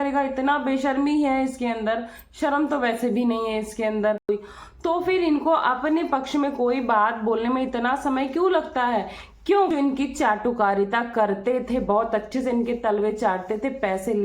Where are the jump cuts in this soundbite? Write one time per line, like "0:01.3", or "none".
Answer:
0:04.3
0:09.7